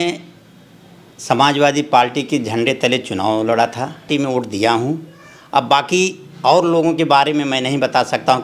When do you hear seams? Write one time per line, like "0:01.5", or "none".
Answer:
0:04.1